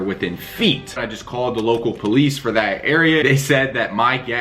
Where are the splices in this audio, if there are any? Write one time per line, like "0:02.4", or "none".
0:01.0
0:03.2